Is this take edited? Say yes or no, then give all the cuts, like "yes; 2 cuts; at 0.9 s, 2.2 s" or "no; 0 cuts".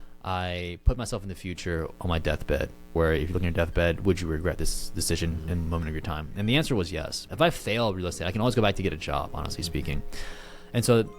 yes; 1 cut; at 2.9 s